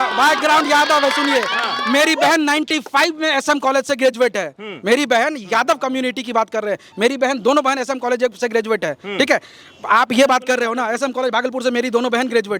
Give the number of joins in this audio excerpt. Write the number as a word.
zero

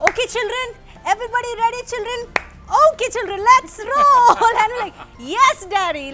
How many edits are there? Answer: zero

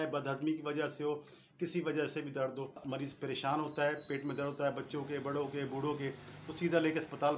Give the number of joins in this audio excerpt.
one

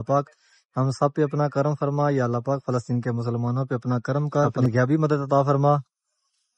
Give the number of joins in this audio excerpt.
one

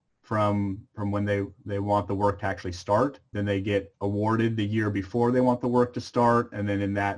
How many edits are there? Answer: one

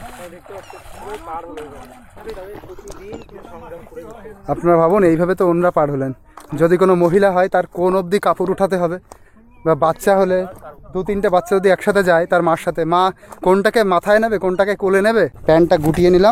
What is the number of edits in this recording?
one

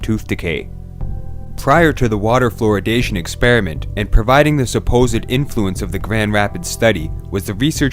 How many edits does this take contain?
zero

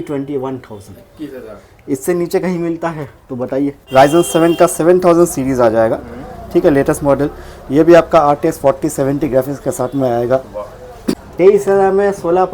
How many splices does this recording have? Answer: two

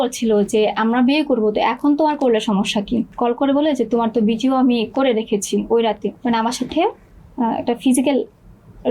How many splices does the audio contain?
two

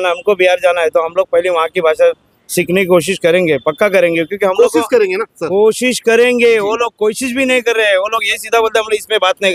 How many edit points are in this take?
one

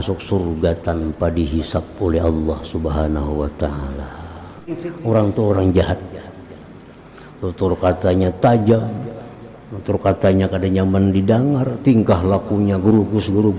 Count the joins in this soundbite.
one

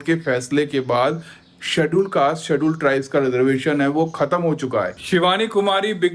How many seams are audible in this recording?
one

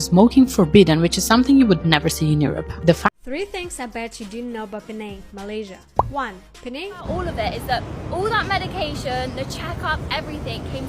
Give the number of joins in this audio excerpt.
two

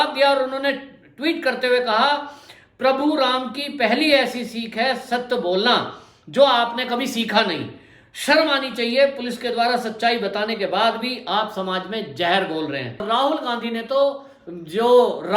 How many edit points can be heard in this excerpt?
one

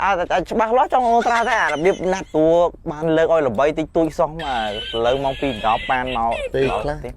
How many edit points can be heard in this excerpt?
one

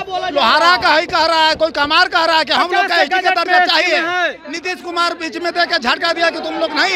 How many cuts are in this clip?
one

